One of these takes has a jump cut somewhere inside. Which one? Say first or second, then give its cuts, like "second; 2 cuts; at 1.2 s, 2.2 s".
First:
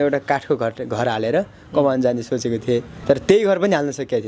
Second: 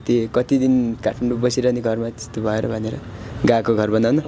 first; 1 cut; at 2.9 s